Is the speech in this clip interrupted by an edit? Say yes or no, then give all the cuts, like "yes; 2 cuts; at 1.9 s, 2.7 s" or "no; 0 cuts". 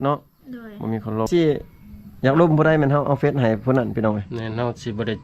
yes; 1 cut; at 1.3 s